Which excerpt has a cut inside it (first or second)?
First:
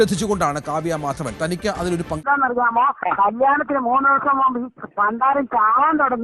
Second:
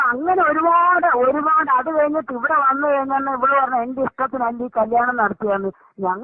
first